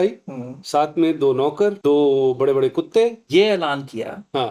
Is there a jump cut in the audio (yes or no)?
yes